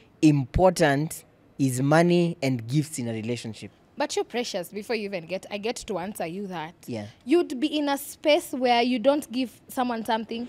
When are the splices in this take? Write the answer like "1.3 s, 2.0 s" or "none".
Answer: none